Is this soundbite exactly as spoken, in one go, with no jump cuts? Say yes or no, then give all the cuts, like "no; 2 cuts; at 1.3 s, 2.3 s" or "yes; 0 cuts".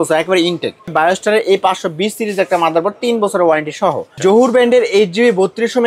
no; 2 cuts; at 0.9 s, 4.1 s